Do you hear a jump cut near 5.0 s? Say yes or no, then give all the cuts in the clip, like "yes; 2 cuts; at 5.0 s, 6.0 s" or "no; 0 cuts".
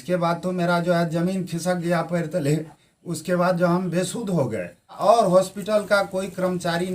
yes; 1 cut; at 5.0 s